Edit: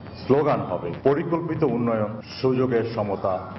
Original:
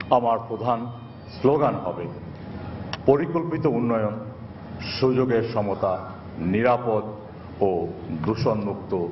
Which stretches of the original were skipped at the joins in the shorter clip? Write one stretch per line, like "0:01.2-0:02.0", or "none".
0:02.1-0:02.9
0:04.3-0:04.8